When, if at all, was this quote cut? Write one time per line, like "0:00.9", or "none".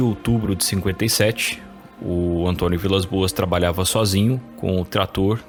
none

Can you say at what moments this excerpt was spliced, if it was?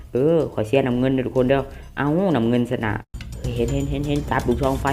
0:03.1

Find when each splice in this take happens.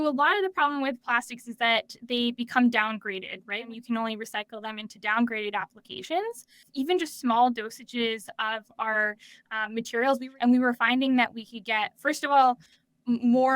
0:03.7
0:06.6
0:10.2

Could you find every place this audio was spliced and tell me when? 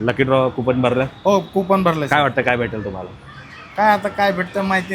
none

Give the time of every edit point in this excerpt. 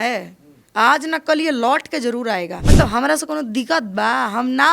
0:02.6

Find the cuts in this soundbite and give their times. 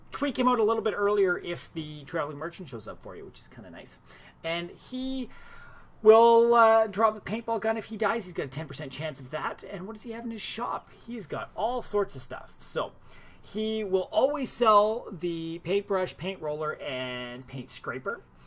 0:13.7

